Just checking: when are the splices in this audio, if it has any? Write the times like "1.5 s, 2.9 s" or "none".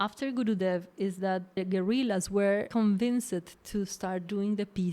1.6 s, 2.7 s